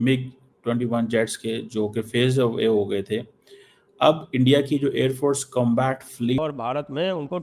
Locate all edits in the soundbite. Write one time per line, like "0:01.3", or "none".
0:06.4